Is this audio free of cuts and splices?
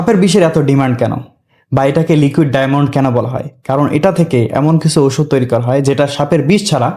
yes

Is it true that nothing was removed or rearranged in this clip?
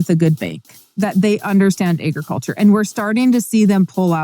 no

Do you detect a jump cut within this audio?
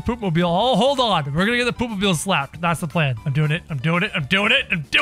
yes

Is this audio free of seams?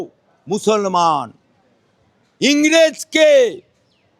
yes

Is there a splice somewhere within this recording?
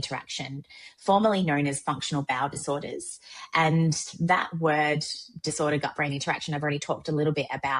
no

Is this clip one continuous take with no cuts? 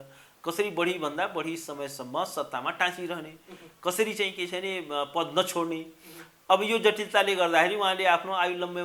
yes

